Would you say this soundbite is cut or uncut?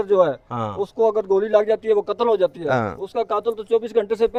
uncut